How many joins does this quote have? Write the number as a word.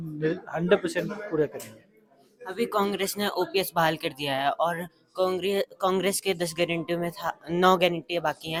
zero